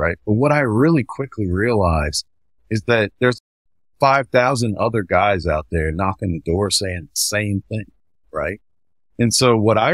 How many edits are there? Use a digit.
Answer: 1